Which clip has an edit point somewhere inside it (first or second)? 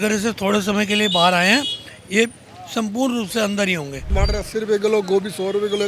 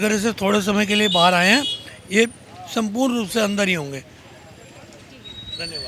first